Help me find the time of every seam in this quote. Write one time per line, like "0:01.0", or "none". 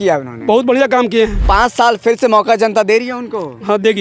0:01.4